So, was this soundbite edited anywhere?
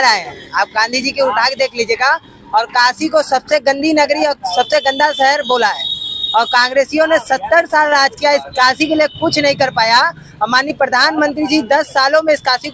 no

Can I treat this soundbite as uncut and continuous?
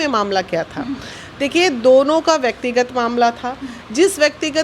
yes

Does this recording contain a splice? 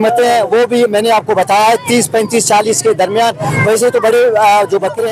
no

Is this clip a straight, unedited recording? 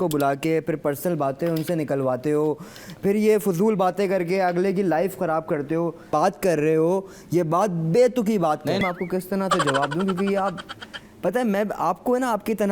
no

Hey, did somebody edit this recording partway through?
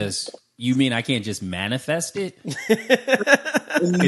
no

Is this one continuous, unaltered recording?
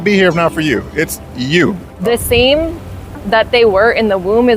no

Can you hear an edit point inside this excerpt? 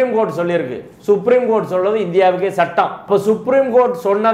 no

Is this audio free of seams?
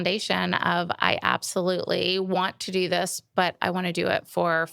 yes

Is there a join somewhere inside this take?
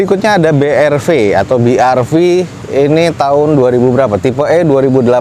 no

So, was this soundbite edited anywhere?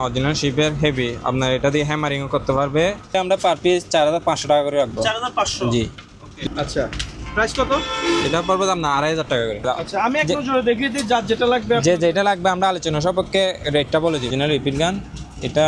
yes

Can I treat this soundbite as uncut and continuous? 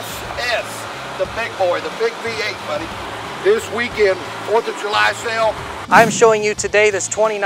no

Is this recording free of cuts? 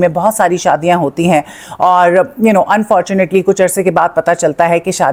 yes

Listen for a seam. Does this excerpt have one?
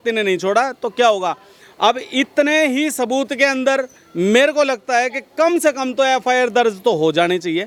no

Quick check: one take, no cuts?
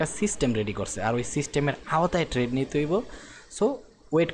yes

